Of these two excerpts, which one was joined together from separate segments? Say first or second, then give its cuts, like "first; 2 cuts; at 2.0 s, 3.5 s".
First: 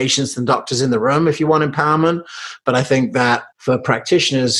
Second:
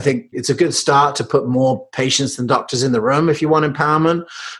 first; 1 cut; at 3.5 s